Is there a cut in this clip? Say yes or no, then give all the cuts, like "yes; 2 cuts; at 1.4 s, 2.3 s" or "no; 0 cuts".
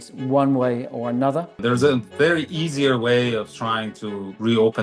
yes; 1 cut; at 1.6 s